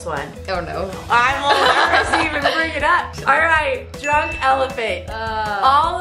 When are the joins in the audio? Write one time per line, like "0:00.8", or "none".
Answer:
0:03.1